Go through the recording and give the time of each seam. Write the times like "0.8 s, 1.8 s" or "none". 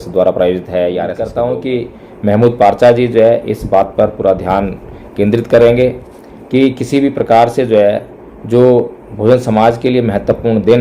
1.3 s

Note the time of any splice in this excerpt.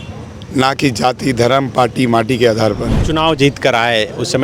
3.0 s

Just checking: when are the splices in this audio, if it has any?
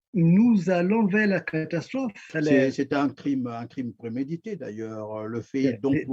2.3 s

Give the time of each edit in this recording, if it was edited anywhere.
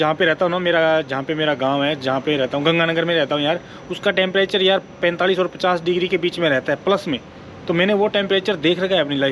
none

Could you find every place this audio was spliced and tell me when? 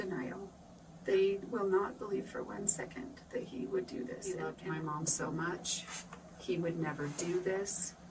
4.5 s

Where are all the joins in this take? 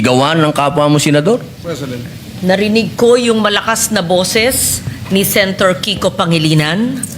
1.6 s

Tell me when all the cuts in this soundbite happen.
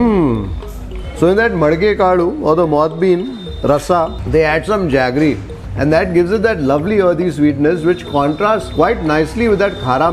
none

